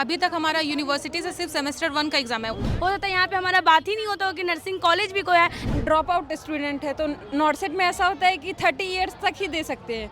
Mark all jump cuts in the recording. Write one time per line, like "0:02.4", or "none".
0:02.6
0:05.6